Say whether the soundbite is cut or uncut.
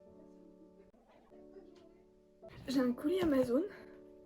cut